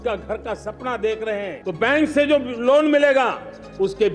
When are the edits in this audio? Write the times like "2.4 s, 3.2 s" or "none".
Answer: 1.6 s